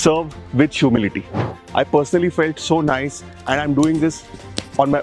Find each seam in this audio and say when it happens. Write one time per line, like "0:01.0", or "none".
0:01.5